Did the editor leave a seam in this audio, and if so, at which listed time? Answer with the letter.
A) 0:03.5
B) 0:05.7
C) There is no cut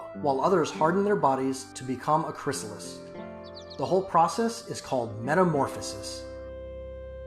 B